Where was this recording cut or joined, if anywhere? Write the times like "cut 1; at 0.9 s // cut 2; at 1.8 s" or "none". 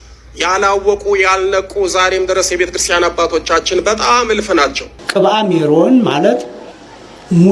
cut 1; at 4.9 s